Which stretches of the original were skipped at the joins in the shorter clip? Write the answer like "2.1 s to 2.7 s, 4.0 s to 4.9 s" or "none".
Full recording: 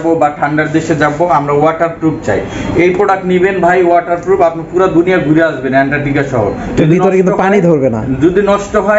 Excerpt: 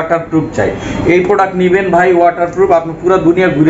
none